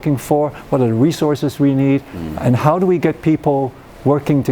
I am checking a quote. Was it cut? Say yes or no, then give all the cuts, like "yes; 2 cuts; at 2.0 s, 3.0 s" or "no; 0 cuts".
no; 0 cuts